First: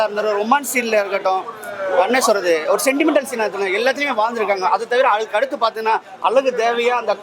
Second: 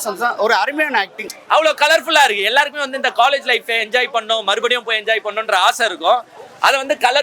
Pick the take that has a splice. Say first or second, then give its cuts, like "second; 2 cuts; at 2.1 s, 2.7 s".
second; 1 cut; at 1.2 s